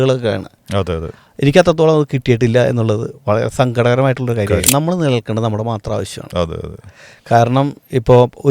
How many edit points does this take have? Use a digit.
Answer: 1